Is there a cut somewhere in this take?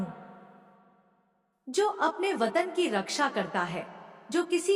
no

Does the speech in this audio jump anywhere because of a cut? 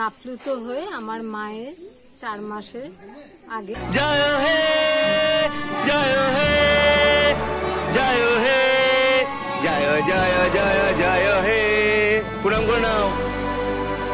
yes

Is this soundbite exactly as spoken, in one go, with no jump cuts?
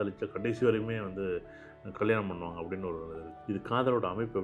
no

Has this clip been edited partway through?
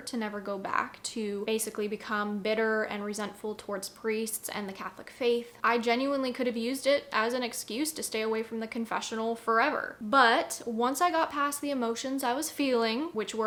no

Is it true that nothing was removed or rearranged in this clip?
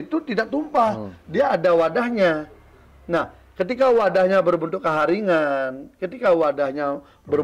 yes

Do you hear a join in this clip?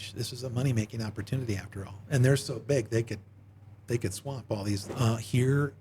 yes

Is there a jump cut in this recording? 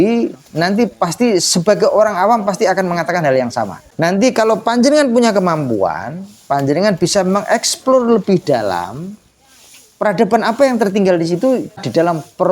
yes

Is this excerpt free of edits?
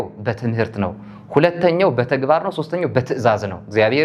yes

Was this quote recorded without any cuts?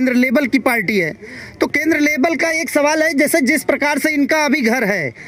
yes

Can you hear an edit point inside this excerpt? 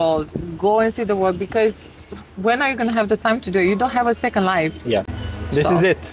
no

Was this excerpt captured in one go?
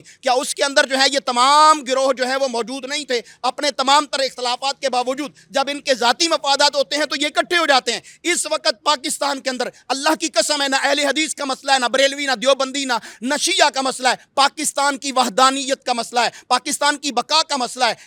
yes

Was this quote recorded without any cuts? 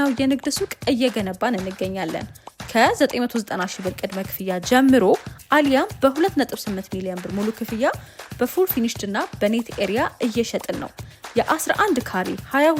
yes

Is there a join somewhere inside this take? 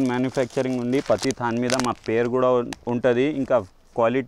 no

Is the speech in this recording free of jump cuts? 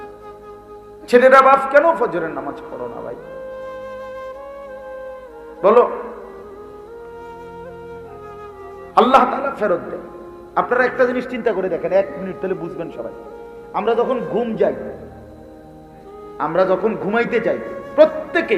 yes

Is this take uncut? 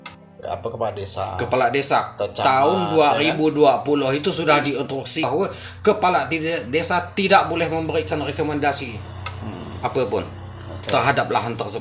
no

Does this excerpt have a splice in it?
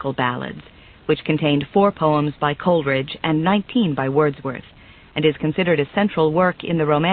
yes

